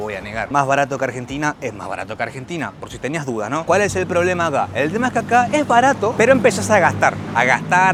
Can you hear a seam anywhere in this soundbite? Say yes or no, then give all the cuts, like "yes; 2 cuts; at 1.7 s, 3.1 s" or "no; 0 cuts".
no; 0 cuts